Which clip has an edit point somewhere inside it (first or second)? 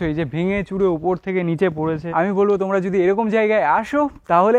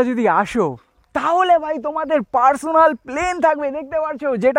first